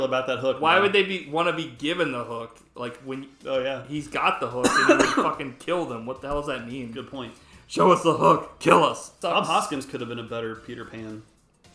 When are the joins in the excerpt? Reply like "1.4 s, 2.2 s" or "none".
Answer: 9.1 s

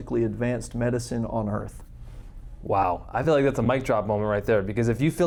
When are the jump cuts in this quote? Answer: none

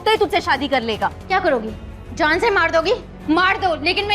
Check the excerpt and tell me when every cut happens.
1.2 s

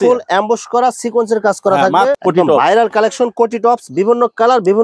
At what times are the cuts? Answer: 2.2 s

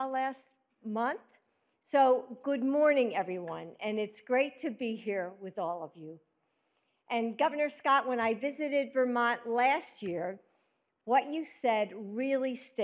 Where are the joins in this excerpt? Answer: 0.8 s, 5.6 s, 10.6 s

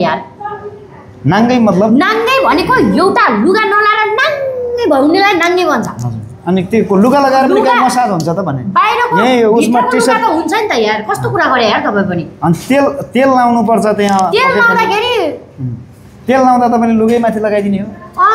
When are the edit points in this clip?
none

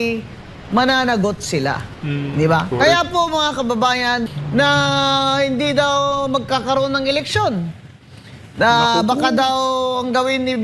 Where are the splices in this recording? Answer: 4.3 s

